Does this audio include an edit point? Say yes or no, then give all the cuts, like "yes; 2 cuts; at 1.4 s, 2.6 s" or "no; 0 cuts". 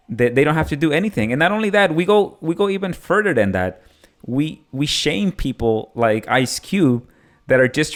no; 0 cuts